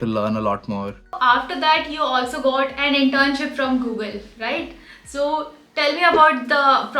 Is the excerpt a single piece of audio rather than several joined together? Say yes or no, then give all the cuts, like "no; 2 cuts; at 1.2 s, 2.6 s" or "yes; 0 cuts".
no; 1 cut; at 1.2 s